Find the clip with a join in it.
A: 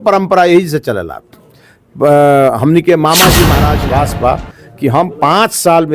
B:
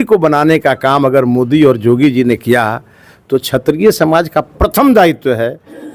A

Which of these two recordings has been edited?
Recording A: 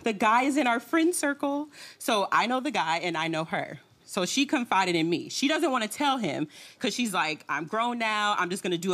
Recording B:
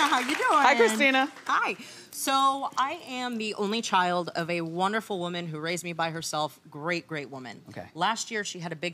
B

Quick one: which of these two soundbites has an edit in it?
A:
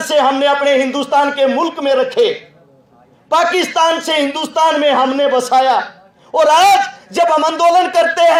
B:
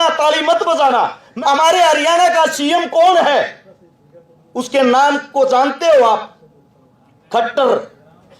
B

